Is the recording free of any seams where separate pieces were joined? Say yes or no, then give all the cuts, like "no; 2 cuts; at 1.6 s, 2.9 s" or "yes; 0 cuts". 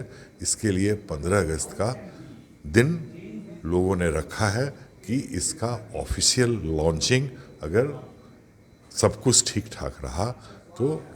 yes; 0 cuts